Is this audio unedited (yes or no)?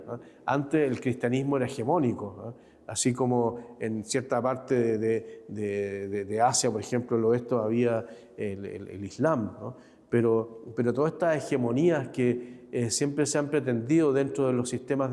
yes